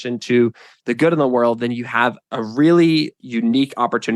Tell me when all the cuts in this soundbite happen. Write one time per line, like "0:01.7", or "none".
0:02.2
0:03.2